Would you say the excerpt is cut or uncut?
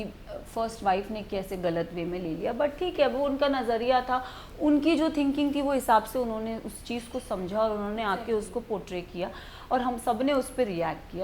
uncut